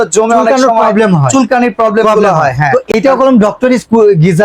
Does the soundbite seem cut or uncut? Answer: cut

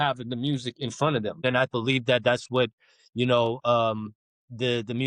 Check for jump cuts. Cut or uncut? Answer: cut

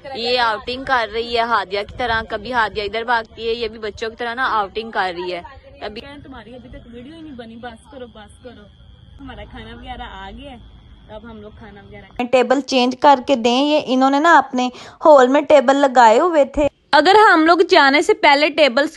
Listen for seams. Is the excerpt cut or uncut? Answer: cut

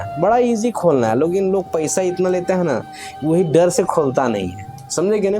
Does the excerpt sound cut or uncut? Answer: uncut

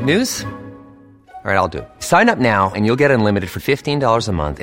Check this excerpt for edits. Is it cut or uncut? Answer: uncut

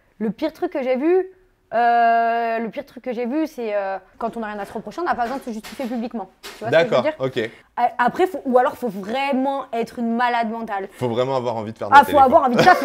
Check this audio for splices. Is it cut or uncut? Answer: cut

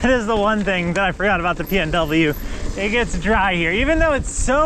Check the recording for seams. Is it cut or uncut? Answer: uncut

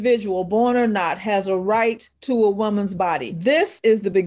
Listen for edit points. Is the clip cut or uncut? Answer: cut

